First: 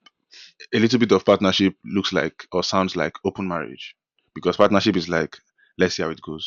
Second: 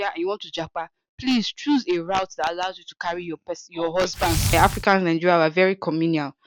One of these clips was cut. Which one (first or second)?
second